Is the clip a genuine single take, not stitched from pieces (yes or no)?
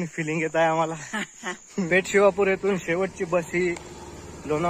no